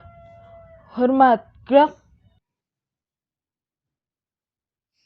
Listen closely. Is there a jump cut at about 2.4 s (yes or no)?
yes